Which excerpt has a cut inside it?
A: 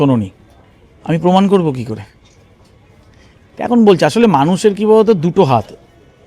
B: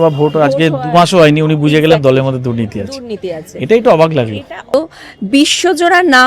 B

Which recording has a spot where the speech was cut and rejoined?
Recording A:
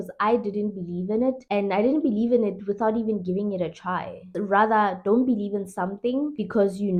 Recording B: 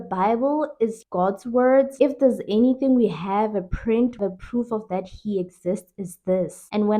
B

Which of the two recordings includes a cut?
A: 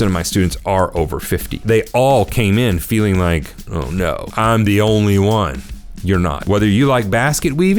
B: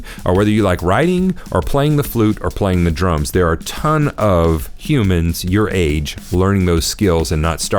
A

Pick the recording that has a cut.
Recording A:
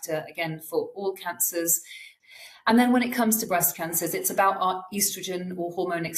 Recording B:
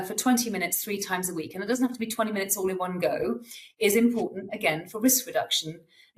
A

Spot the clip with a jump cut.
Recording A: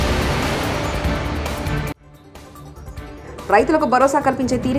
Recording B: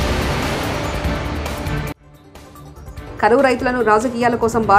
A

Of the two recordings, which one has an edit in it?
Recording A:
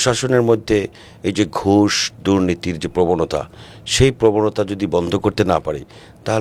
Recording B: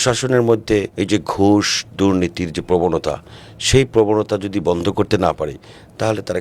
B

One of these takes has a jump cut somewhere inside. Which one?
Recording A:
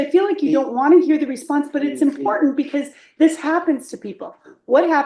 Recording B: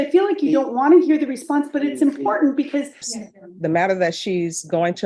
B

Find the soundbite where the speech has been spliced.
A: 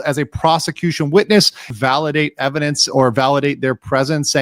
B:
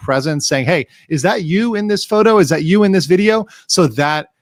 A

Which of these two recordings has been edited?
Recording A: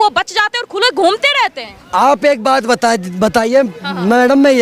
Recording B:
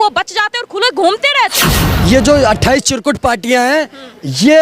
B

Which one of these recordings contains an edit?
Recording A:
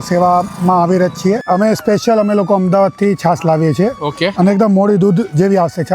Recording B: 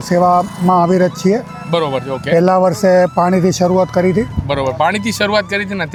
A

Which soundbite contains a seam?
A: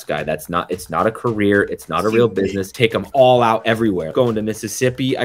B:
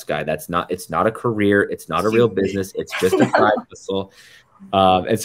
A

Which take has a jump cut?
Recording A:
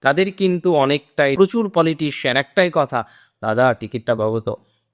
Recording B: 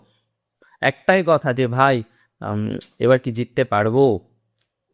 A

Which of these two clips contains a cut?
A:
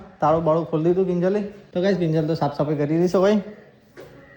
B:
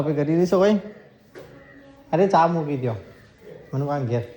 A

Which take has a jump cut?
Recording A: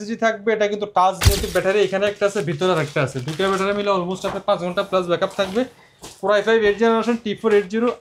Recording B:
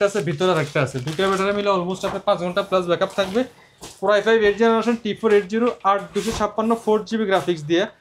A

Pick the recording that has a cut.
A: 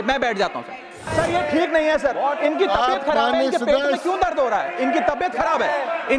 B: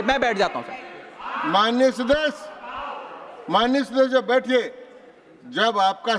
A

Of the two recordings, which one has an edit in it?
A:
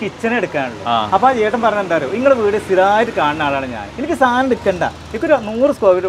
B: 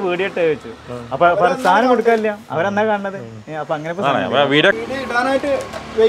B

